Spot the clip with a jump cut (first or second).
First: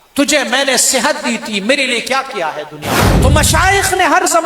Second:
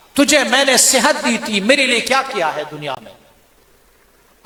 first